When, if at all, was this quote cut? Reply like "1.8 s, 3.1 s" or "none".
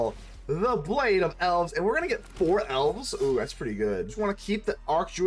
4.2 s